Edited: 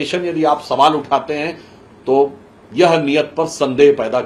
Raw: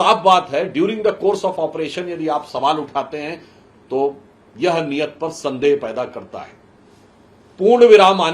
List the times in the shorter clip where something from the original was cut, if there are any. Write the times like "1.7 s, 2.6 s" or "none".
none